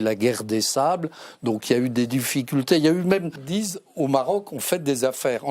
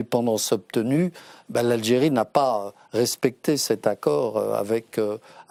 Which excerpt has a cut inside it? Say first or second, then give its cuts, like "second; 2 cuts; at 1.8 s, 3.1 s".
first; 1 cut; at 3.4 s